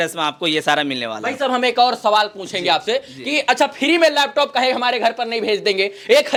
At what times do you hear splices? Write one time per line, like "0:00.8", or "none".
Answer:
none